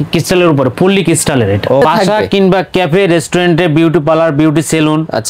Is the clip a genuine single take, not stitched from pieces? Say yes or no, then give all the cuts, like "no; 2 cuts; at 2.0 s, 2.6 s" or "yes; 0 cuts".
no; 1 cut; at 1.8 s